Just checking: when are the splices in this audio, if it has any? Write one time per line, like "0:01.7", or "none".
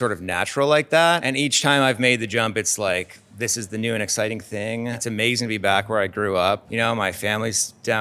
0:01.2
0:05.0
0:06.7